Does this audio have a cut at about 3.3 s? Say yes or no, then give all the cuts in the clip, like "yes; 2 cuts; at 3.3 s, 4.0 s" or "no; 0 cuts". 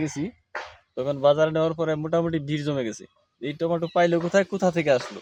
no; 0 cuts